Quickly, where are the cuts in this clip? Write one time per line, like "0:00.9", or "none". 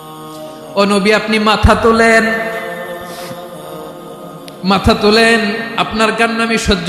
0:00.8
0:02.7
0:04.6